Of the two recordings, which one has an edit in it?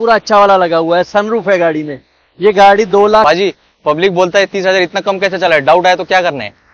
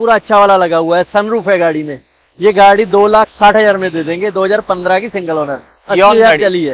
first; 1 cut; at 3.2 s

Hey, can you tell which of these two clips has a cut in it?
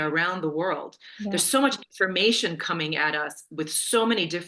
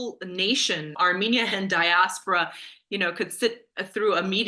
second; 1 cut; at 1.0 s

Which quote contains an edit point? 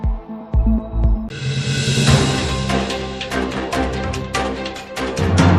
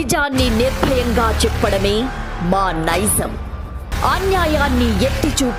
first; 1 cut; at 1.4 s

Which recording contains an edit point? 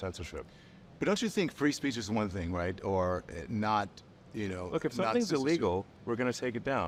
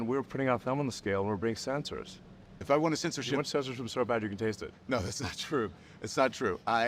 second; 1 cut; at 2.6 s

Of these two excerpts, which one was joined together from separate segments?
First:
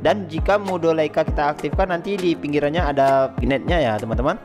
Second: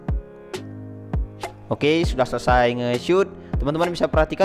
first; 1 cut; at 3.4 s

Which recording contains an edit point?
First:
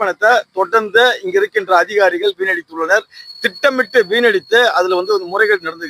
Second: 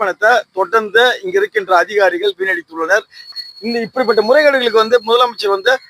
second; 1 cut; at 3.4 s

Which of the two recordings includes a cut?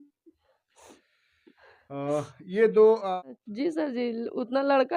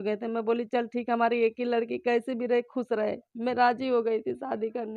first; 1 cut; at 3.1 s

